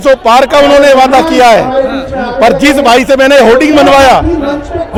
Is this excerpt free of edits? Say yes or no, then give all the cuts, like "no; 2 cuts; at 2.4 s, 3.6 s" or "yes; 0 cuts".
yes; 0 cuts